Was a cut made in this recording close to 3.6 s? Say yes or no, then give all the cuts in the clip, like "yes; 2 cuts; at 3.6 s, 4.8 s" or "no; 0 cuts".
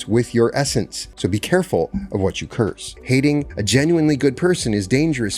yes; 3 cuts; at 1.0 s, 2.9 s, 3.6 s